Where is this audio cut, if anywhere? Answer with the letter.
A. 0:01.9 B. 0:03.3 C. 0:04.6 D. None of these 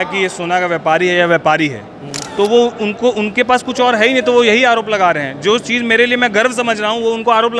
D